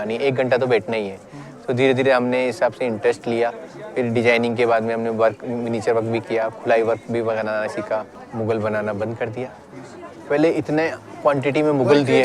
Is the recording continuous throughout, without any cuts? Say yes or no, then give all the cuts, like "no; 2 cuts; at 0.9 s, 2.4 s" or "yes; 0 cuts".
no; 1 cut; at 8.2 s